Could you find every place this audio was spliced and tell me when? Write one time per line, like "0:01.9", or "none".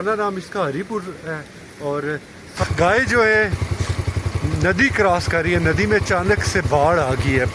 0:02.6